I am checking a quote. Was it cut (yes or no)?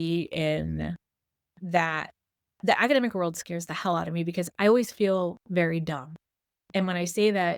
no